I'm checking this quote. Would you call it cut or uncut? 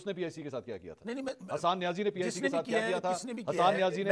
uncut